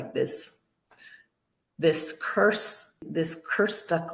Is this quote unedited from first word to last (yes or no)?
no